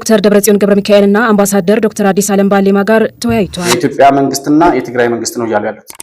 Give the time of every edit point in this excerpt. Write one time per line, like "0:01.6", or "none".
0:03.6